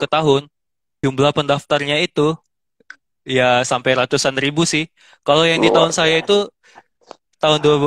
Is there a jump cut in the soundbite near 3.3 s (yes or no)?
no